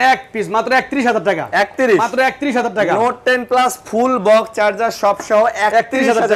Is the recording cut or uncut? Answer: uncut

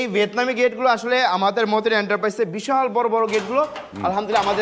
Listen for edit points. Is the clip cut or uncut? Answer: uncut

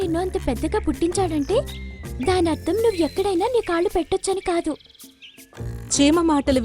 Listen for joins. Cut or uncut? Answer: uncut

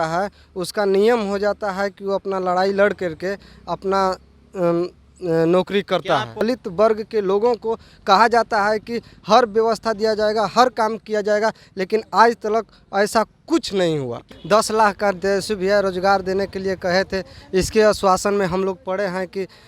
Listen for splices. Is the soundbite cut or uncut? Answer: cut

